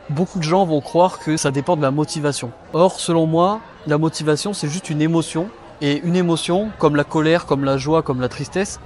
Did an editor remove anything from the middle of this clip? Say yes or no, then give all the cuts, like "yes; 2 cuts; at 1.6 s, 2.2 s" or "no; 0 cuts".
yes; 3 cuts; at 1.4 s, 2.5 s, 5.6 s